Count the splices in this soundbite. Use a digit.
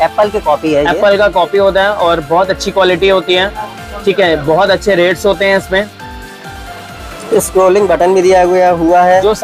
0